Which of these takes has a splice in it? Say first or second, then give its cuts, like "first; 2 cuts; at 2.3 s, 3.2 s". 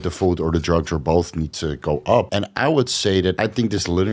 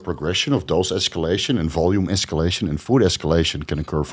first; 2 cuts; at 2.3 s, 3.4 s